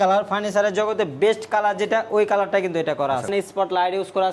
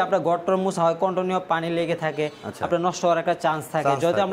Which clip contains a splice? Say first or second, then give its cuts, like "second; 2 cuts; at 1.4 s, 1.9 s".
first; 1 cut; at 3.3 s